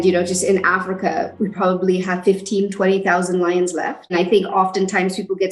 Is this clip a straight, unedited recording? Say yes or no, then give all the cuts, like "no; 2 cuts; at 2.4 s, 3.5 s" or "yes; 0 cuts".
no; 2 cuts; at 1.3 s, 4.1 s